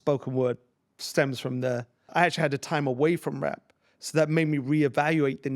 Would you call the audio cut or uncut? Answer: cut